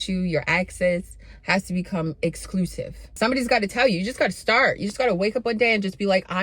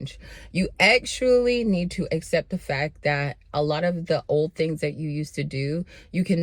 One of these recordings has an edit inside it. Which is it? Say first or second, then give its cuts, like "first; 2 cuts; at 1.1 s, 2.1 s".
first; 2 cuts; at 2.9 s, 4.9 s